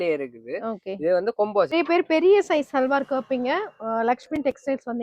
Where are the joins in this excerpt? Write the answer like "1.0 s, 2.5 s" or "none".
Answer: 1.7 s